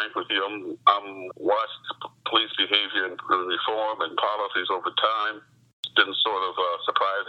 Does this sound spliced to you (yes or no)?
yes